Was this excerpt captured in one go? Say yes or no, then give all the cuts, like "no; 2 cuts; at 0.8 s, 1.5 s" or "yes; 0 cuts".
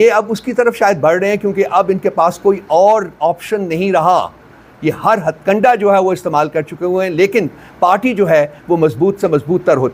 yes; 0 cuts